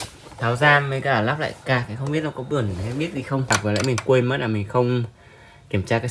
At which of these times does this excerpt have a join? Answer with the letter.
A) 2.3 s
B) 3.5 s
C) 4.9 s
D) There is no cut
B